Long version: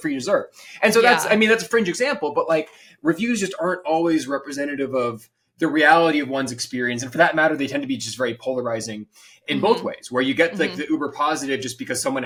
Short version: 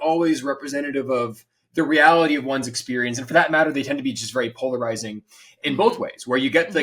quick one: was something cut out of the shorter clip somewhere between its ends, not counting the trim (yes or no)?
no